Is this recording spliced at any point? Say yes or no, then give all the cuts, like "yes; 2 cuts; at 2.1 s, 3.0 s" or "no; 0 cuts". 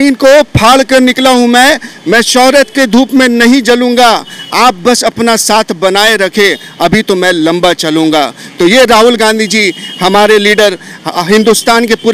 no; 0 cuts